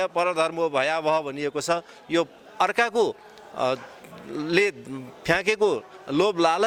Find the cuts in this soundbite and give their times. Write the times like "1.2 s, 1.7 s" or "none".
none